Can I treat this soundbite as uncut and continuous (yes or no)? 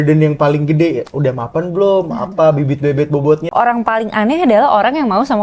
no